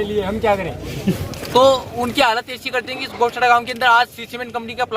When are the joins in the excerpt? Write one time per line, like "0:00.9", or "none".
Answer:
0:01.2